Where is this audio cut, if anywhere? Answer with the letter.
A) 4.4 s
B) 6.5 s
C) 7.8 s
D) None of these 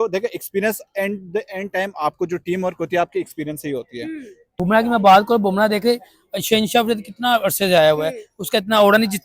A